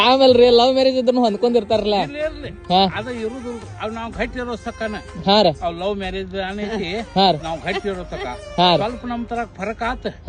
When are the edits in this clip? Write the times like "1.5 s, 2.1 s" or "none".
none